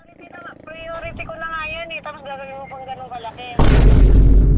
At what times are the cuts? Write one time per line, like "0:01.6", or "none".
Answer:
0:03.5

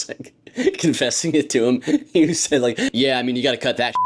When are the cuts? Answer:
none

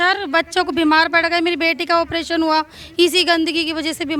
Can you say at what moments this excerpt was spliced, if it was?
none

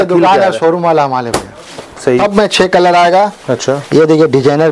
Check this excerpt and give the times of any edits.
0:02.2

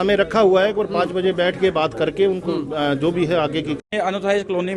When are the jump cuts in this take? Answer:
0:03.8

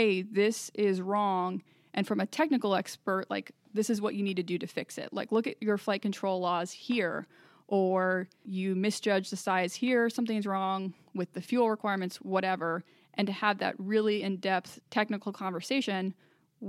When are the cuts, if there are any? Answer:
0:08.5
0:14.8

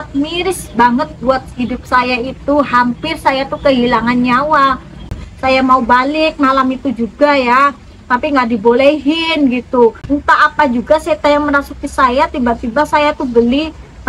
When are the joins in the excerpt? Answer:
0:05.3
0:10.0

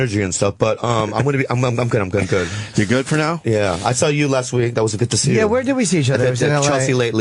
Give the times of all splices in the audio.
0:01.4

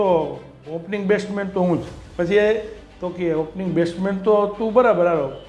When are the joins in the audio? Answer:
0:02.0

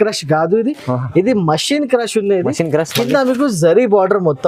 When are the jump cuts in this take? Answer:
none

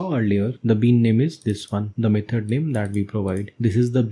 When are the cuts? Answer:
0:01.9

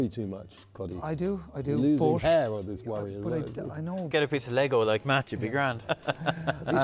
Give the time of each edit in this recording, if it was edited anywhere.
0:04.1
0:05.9

